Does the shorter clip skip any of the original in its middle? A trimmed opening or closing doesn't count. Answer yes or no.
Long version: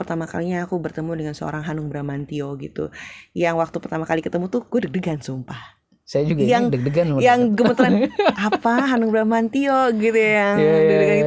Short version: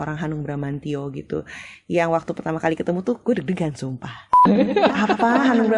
yes